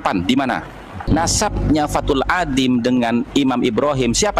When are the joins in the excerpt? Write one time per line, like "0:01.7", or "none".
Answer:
0:01.0